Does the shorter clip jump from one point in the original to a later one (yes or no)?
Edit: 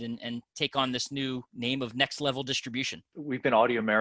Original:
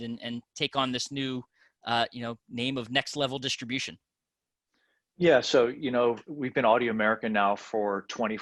yes